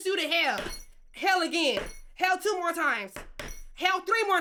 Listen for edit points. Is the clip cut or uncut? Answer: uncut